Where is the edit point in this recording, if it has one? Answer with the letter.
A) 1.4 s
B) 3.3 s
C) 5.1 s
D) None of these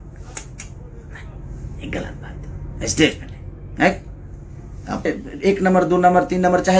C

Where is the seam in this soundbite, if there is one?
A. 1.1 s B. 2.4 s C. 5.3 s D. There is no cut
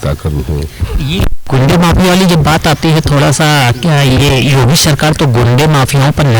D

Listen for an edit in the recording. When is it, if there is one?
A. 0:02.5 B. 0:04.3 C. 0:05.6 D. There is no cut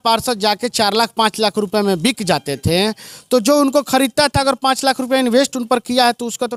D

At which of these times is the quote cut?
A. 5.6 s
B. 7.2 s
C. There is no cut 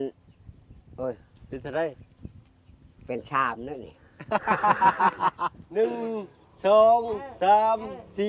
A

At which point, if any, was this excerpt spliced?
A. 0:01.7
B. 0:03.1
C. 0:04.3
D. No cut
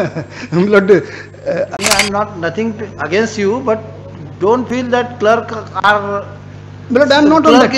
A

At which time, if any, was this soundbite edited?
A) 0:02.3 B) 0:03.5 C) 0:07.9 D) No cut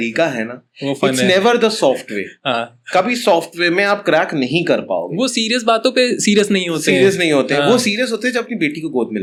D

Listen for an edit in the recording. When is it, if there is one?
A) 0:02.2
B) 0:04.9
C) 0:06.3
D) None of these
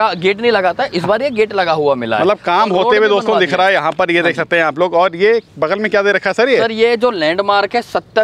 D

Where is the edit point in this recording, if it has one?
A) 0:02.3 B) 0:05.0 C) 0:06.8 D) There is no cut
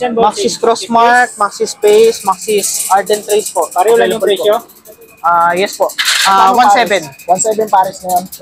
D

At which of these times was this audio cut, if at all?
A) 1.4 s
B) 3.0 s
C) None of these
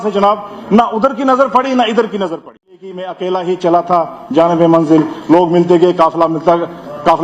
B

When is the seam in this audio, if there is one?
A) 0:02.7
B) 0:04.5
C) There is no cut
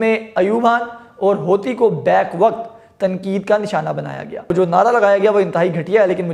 B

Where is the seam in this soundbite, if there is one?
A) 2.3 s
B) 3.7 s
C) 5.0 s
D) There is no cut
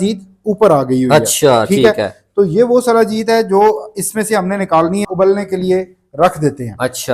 C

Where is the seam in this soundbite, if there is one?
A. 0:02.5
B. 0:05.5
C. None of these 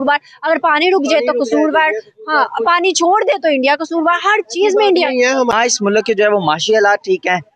B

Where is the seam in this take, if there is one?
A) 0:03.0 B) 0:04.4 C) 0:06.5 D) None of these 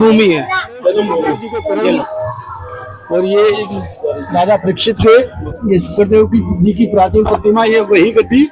A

